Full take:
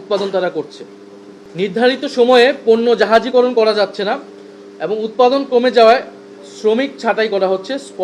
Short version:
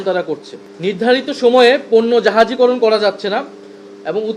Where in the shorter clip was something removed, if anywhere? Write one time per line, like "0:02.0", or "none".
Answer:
0:00.9